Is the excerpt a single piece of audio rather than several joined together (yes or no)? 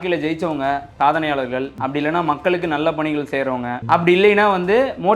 no